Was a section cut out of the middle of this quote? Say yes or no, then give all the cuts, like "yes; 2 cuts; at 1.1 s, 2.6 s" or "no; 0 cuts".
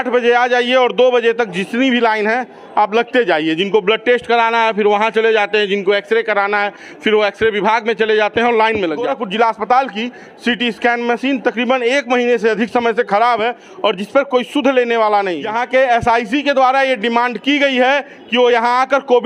yes; 2 cuts; at 9.1 s, 15.5 s